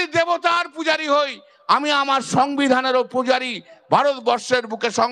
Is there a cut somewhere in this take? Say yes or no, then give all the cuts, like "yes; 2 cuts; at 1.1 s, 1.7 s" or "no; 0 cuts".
no; 0 cuts